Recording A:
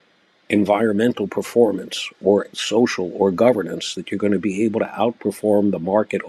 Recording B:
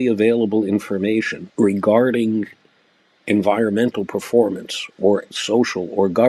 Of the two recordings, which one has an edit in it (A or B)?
B